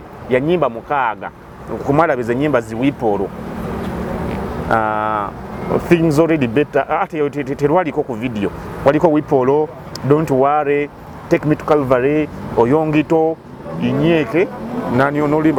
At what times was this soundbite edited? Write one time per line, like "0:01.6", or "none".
none

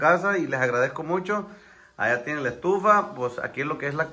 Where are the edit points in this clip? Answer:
none

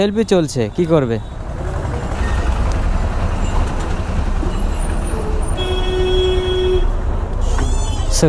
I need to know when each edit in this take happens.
0:02.2

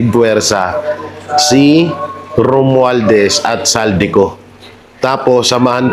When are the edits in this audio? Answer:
none

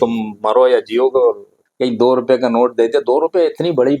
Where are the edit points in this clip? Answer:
0:01.7

